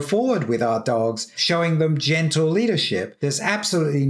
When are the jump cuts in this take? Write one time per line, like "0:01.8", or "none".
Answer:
0:01.3
0:03.1